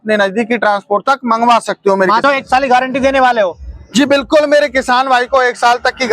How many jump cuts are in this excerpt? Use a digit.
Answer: 1